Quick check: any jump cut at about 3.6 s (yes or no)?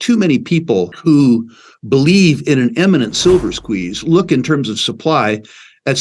no